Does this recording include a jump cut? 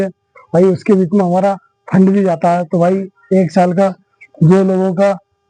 no; 0 cuts

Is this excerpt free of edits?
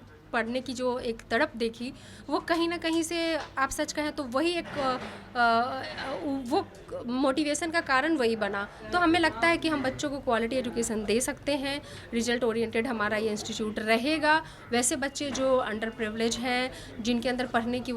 no; 1 cut; at 8.7 s

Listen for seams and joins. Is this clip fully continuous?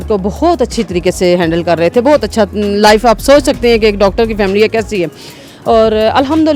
yes; 0 cuts

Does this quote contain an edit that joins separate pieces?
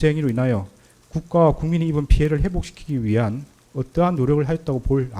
no; 0 cuts

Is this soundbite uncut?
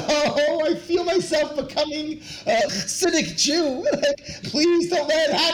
no; 1 cut; at 4.4 s

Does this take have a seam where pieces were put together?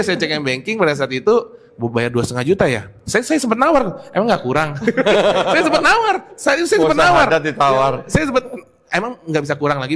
no; 0 cuts

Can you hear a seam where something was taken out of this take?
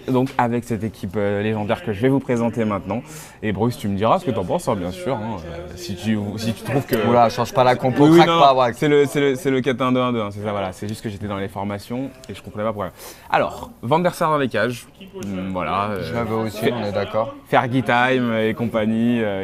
yes; 1 cut; at 4.5 s

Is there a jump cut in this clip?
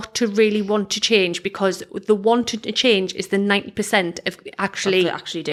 no; 0 cuts

